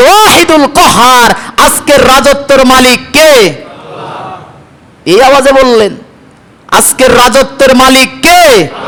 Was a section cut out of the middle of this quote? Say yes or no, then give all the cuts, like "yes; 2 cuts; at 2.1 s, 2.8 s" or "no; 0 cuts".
no; 0 cuts